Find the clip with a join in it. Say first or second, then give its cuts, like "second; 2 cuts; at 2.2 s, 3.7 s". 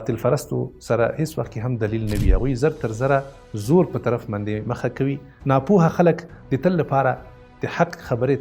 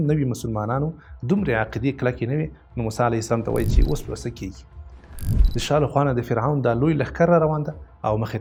first; 1 cut; at 5.3 s